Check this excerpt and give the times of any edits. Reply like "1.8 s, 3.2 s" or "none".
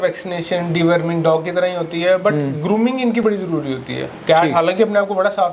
none

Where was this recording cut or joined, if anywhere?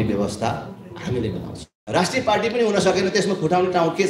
1.7 s

